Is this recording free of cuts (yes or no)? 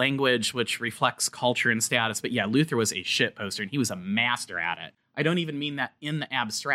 no